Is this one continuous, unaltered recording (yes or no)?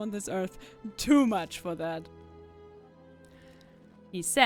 yes